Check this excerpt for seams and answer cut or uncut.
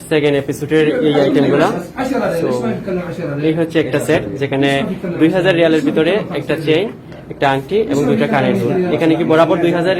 uncut